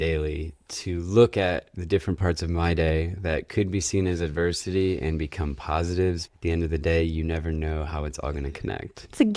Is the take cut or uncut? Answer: cut